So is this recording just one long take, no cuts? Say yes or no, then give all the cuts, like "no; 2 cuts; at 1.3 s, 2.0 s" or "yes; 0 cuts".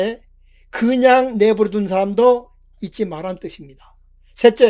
yes; 0 cuts